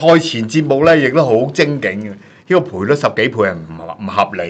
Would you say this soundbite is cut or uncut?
uncut